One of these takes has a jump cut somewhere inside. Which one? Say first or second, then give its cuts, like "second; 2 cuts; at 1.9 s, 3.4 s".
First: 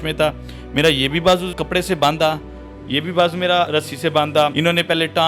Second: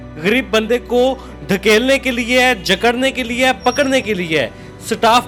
first; 3 cuts; at 1.5 s, 3.7 s, 4.5 s